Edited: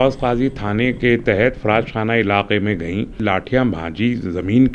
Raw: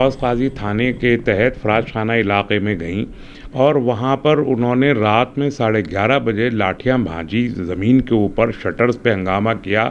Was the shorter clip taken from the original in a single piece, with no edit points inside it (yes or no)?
no